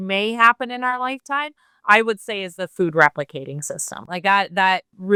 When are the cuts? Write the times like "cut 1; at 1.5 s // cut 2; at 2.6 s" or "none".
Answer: none